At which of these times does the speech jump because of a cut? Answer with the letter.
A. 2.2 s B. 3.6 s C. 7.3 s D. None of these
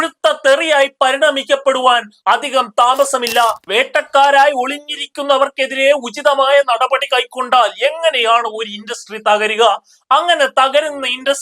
B